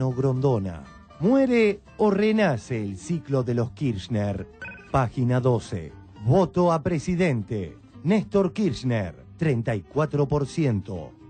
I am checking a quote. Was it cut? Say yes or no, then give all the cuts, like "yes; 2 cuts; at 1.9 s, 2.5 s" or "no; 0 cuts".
no; 0 cuts